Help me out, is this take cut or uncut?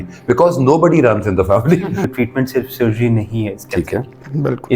cut